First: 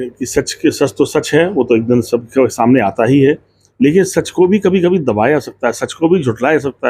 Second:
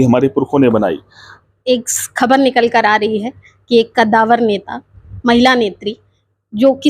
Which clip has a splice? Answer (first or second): second